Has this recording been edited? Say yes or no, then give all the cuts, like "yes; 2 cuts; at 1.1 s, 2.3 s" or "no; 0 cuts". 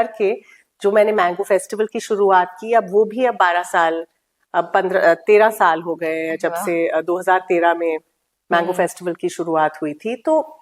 no; 0 cuts